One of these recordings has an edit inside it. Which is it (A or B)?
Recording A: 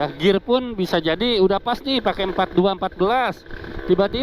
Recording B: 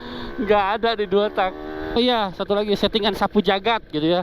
B